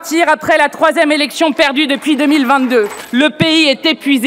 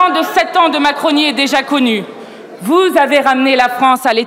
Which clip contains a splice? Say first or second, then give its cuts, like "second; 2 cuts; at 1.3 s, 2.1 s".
first; 1 cut; at 3.0 s